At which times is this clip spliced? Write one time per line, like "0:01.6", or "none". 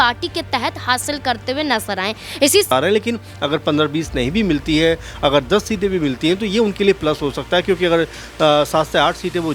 0:02.7